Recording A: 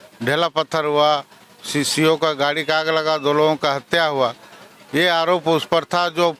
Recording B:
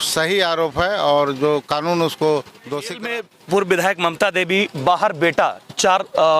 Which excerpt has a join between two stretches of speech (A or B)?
B